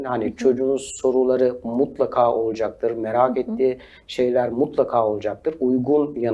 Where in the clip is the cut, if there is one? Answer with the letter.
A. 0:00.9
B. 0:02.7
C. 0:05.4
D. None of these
D